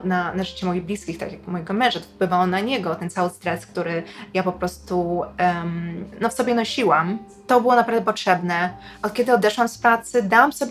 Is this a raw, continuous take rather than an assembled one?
yes; 0 cuts

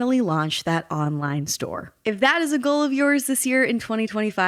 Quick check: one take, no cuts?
yes; 0 cuts

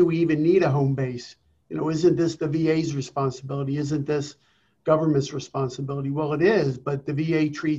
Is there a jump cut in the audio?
no; 0 cuts

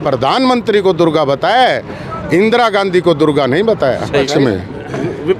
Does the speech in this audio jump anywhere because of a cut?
yes; 1 cut; at 4.3 s

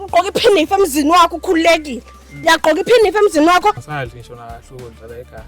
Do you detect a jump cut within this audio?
yes; 1 cut; at 3.8 s

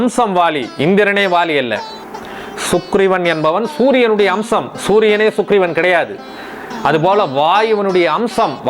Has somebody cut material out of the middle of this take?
no; 0 cuts

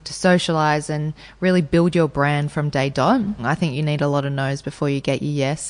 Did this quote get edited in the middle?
yes; 1 cut; at 3.4 s

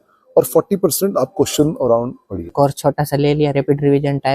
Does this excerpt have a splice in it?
yes; 1 cut; at 2.5 s

